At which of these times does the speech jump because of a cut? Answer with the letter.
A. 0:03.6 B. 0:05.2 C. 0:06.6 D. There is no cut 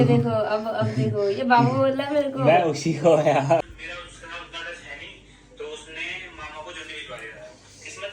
A